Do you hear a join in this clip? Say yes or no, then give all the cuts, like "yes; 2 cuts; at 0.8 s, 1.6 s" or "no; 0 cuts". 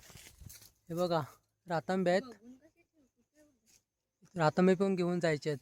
no; 0 cuts